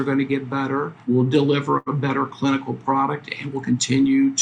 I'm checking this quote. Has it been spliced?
yes; 1 cut; at 0.9 s

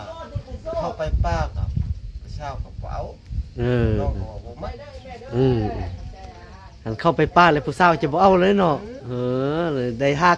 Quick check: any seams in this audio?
no; 0 cuts

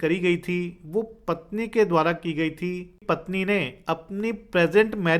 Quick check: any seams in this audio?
yes; 1 cut; at 3.0 s

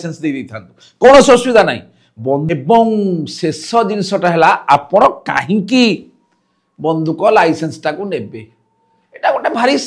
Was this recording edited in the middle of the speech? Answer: yes; 1 cut; at 2.5 s

